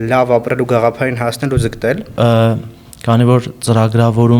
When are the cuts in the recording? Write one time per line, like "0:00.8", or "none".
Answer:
0:02.1